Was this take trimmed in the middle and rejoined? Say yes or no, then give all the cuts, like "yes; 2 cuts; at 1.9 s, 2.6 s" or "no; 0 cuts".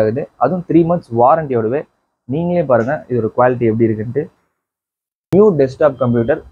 yes; 1 cut; at 5.0 s